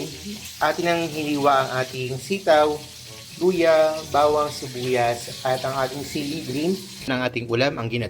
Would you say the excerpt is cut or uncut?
cut